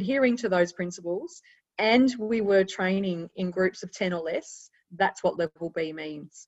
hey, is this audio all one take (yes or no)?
yes